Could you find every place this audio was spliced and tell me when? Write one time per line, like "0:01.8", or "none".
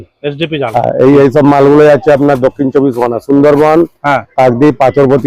none